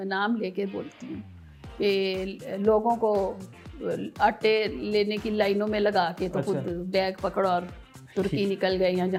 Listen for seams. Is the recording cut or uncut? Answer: uncut